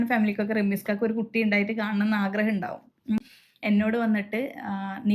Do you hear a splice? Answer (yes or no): yes